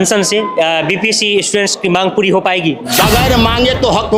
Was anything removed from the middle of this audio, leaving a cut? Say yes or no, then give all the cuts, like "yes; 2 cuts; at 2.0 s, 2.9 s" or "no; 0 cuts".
yes; 1 cut; at 2.8 s